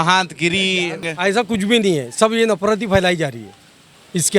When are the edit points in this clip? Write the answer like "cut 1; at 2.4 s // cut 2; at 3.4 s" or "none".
cut 1; at 1.1 s